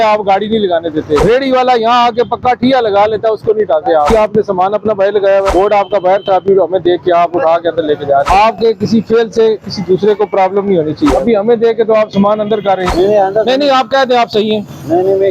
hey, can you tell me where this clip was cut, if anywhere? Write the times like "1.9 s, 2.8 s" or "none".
1.2 s, 4.1 s, 5.5 s, 8.3 s, 11.1 s, 12.9 s